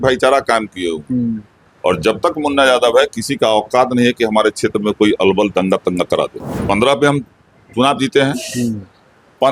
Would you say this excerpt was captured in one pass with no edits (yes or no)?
no